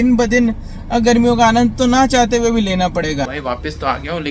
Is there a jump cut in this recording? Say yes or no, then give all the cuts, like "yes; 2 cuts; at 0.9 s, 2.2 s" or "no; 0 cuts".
yes; 1 cut; at 3.3 s